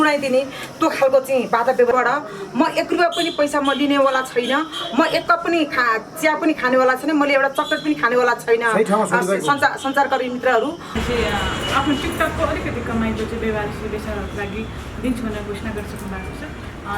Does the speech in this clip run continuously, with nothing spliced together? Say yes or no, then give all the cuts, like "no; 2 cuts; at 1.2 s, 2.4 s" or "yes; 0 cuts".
no; 2 cuts; at 1.9 s, 11.0 s